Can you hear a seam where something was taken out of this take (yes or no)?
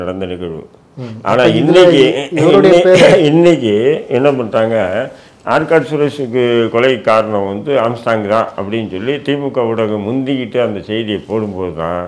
no